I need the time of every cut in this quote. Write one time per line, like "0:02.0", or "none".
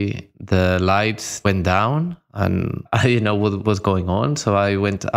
0:01.4
0:03.6